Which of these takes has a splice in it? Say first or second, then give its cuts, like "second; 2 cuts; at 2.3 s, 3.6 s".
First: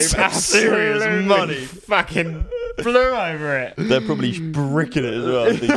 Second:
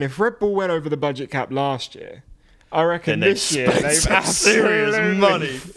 first; 1 cut; at 3.7 s